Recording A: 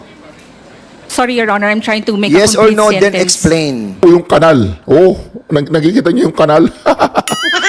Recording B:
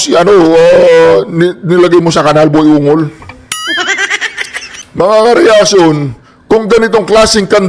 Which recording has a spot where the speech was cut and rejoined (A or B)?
A